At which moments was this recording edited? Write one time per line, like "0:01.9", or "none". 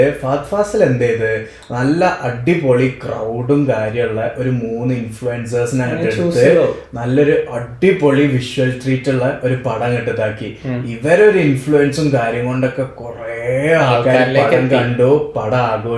none

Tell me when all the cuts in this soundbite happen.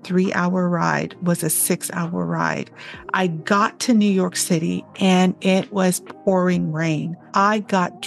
0:03.4
0:07.2

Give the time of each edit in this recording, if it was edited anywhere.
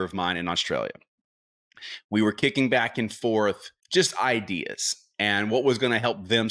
0:03.7

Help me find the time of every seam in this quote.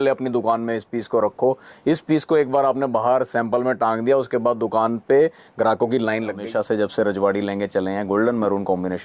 0:06.4

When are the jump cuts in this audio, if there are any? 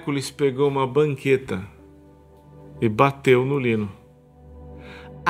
none

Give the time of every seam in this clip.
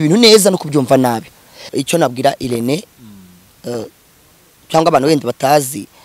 0:01.7

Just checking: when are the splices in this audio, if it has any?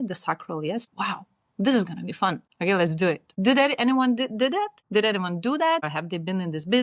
0:00.9
0:02.5
0:03.3
0:04.8
0:05.9

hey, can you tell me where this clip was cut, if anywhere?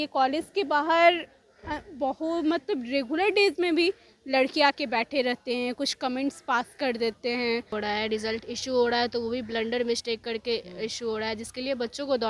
0:07.7

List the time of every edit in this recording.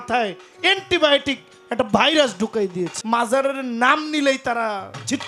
0:02.9

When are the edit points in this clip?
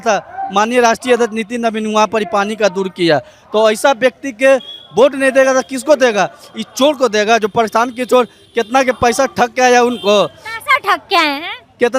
none

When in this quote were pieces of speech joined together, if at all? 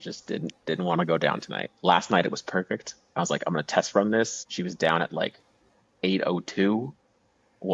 0:04.4

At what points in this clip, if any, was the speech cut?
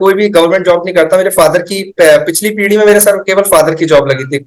none

